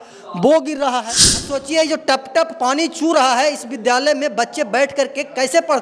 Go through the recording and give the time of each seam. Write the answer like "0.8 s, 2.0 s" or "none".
1.5 s